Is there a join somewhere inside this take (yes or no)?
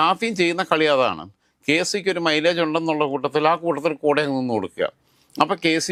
no